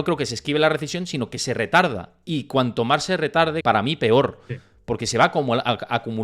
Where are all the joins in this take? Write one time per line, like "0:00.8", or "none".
0:03.6